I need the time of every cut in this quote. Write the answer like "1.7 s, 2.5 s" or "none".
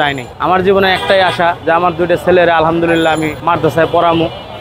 3.4 s